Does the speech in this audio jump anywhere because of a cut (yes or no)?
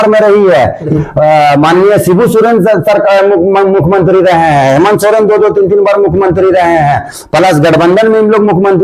yes